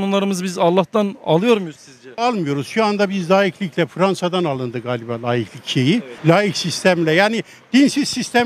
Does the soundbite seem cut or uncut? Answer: cut